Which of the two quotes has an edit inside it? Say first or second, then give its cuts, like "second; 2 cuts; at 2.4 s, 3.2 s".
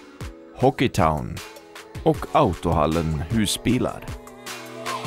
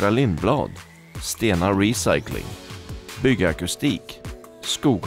first; 1 cut; at 4.1 s